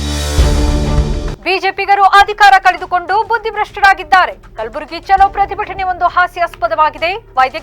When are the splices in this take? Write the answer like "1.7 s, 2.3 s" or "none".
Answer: 1.3 s